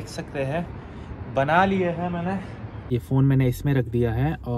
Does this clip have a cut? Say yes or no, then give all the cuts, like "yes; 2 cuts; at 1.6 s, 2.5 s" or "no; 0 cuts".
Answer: yes; 1 cut; at 2.8 s